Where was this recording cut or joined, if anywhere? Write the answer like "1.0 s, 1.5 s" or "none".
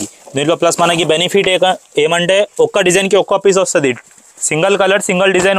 none